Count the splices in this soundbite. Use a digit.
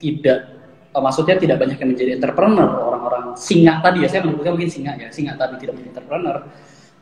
0